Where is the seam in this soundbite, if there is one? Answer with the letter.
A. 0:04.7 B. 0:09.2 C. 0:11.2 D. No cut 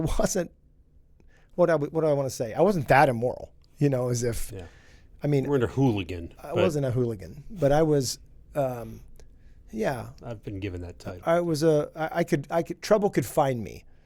C